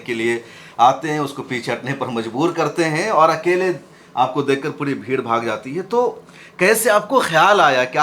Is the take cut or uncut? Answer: uncut